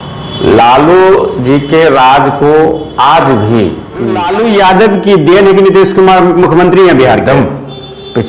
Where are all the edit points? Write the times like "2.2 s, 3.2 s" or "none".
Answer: 4.3 s